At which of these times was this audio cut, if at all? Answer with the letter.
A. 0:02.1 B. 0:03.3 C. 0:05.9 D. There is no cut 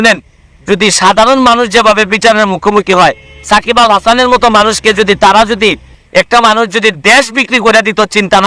C